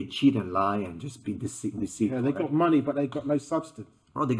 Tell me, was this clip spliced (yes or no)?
no